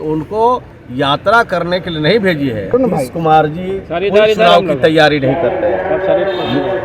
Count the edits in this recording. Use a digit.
1